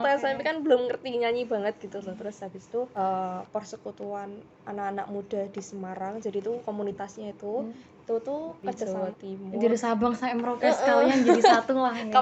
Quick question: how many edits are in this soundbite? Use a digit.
2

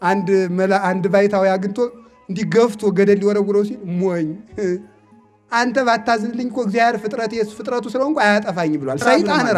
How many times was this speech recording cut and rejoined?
0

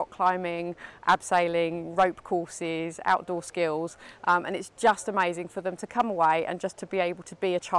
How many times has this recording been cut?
0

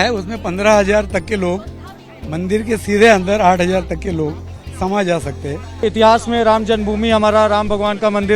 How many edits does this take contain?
1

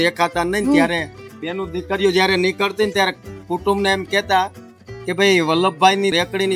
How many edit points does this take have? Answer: 0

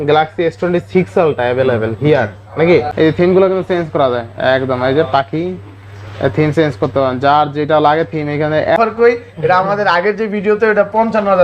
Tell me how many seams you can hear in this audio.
2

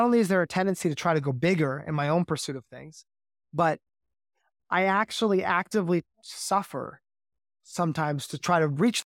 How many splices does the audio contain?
0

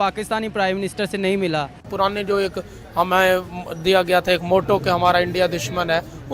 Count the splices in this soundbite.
1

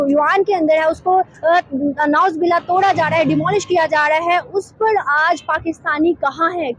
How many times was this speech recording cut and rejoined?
0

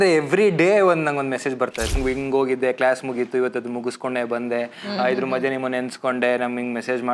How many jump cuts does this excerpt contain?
1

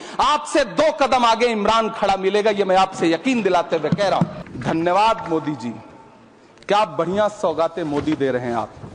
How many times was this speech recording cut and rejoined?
1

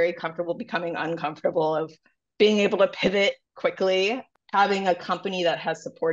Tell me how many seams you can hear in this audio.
1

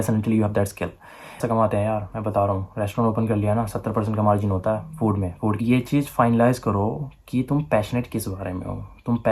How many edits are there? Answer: 2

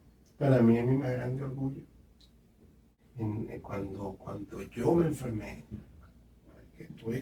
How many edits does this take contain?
1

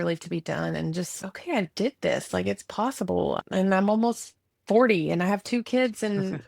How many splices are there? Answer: 2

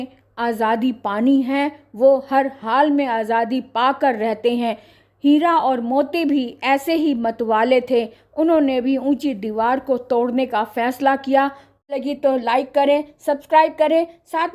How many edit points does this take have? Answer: 1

